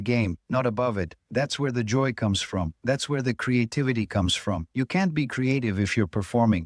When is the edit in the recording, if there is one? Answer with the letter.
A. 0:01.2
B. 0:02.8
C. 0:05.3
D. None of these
D